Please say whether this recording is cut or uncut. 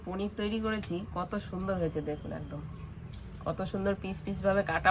uncut